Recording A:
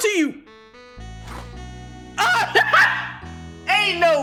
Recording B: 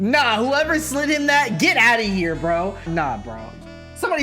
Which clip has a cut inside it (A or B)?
B